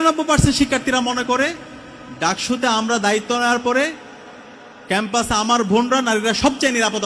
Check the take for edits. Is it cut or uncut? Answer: uncut